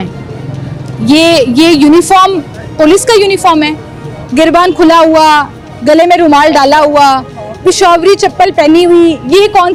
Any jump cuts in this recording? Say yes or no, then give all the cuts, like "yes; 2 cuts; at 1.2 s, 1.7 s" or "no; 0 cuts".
no; 0 cuts